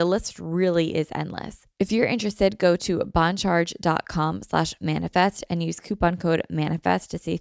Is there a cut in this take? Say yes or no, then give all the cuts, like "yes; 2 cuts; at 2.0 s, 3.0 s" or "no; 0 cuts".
yes; 1 cut; at 1.6 s